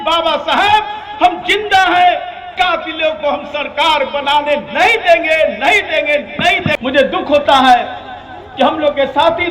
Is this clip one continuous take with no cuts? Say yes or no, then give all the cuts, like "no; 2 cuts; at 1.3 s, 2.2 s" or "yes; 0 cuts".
no; 1 cut; at 6.7 s